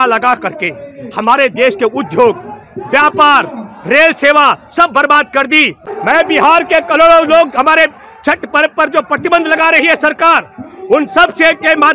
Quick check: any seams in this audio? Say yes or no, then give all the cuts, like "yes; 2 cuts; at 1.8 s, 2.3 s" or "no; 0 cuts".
yes; 1 cut; at 5.8 s